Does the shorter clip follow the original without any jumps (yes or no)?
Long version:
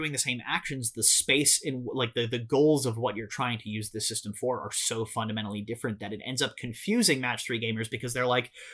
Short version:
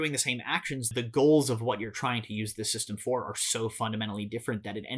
no